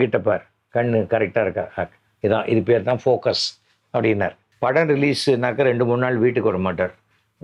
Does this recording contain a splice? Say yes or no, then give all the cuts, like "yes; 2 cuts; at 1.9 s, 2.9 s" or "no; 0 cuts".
yes; 1 cut; at 4.4 s